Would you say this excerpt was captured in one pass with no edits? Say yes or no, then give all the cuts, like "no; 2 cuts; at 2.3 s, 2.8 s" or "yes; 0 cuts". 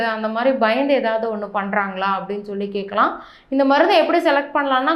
yes; 0 cuts